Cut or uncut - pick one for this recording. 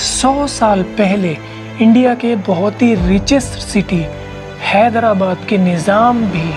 uncut